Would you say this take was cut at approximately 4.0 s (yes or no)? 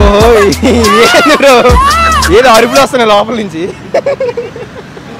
no